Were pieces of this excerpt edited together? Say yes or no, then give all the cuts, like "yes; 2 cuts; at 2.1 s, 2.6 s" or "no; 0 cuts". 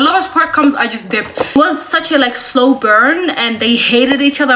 no; 0 cuts